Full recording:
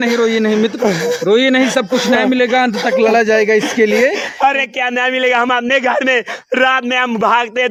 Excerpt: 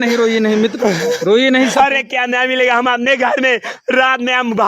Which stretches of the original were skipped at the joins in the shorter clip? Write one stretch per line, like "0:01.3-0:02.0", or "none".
0:01.7-0:04.4

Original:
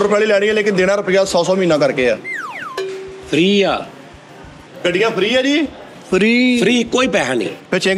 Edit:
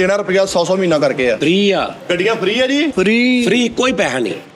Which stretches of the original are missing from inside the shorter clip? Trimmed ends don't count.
0:02.2-0:03.3
0:03.9-0:04.7
0:05.7-0:06.1

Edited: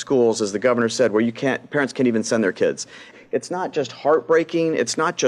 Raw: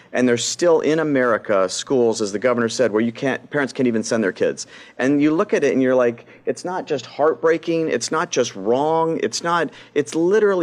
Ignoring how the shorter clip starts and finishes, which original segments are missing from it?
0:04.9-0:06.2

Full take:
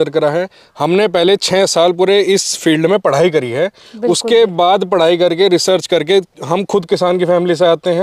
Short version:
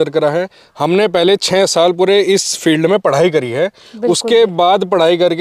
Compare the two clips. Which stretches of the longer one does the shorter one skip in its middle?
none

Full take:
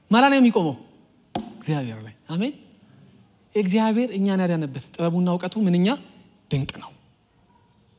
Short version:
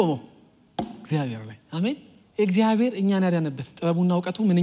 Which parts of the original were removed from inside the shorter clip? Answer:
0:02.7-0:03.3

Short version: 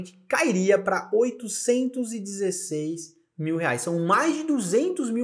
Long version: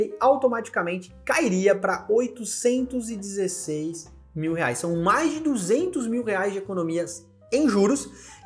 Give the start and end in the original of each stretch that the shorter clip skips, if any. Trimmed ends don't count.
none

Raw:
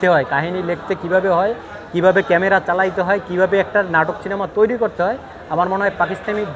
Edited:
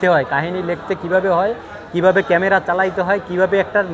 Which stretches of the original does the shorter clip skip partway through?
none

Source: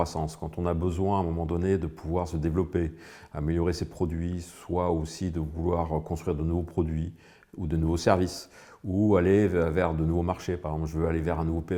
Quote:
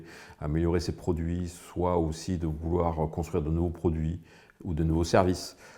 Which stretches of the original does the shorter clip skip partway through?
none

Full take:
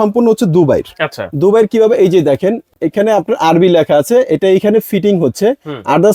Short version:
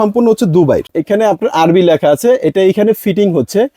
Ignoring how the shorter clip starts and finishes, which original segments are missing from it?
0:00.9-0:02.8

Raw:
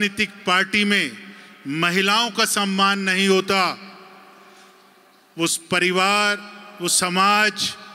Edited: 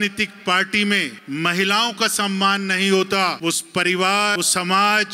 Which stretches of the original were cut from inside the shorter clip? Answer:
0:01.2-0:01.5
0:03.7-0:05.3
0:06.3-0:06.8

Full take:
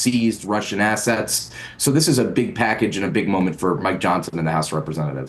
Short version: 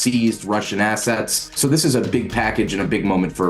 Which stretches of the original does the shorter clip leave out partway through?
0:01.4-0:01.6

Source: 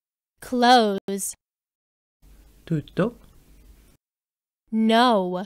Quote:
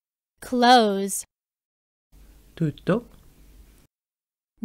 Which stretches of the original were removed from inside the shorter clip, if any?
0:01.0-0:01.1

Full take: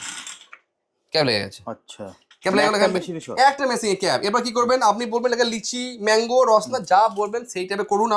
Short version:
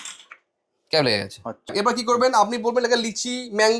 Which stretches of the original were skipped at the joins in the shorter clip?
0:01.9-0:04.2

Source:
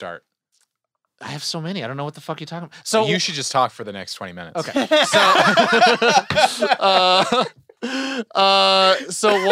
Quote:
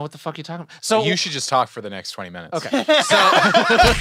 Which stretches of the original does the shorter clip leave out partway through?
none

